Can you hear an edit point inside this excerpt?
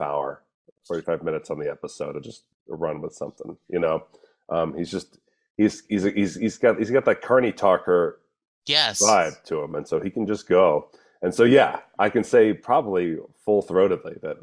no; 0 cuts

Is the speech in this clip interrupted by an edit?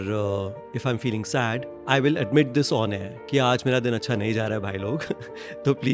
yes; 1 cut; at 1.7 s

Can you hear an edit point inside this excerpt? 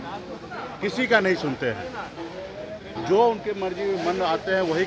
no; 0 cuts

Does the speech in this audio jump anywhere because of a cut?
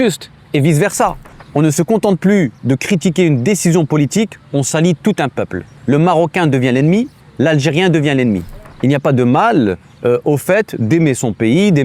yes; 3 cuts; at 1.2 s, 5.7 s, 8.5 s

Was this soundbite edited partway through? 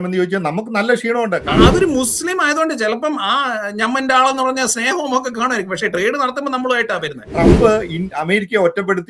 yes; 2 cuts; at 1.4 s, 7.2 s

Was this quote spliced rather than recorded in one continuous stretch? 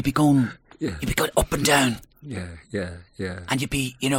no; 0 cuts

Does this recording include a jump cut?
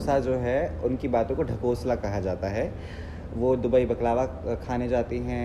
no; 0 cuts

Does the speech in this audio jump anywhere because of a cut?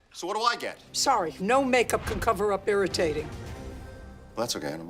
no; 0 cuts

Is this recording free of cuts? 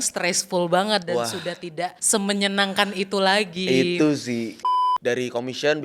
no; 2 cuts; at 2.0 s, 4.6 s

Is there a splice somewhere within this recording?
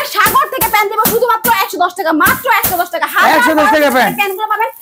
no; 0 cuts

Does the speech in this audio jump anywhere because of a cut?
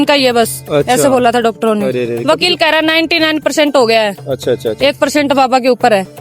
yes; 1 cut; at 2.1 s

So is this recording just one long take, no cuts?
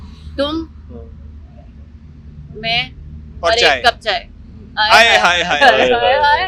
yes; 0 cuts

